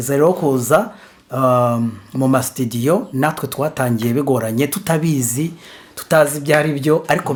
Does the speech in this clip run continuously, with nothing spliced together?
yes; 0 cuts

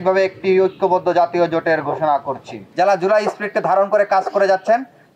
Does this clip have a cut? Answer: yes; 1 cut; at 2.6 s

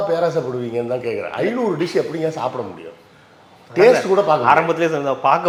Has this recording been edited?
no; 0 cuts

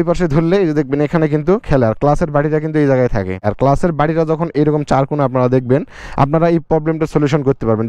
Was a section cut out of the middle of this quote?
yes; 1 cut; at 3.5 s

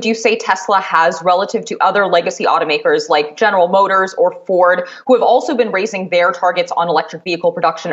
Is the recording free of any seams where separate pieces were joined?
yes; 0 cuts

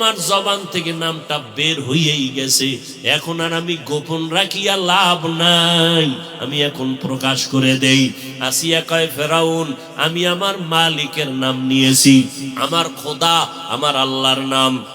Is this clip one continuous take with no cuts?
no; 1 cut; at 12.5 s

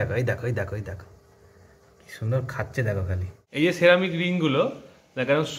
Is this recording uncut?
no; 1 cut; at 3.3 s

